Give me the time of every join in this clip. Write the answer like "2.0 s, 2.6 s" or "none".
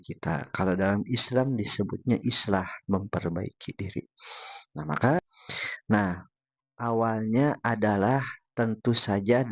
5.2 s